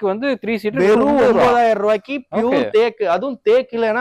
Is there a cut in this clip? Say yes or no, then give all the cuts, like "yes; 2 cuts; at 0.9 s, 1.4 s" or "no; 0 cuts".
no; 0 cuts